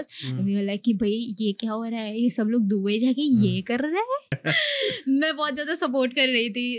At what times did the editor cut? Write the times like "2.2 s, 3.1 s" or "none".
4.4 s